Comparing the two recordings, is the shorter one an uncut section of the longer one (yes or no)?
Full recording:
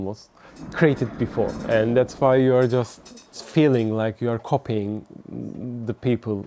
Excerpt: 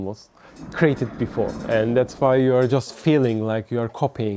no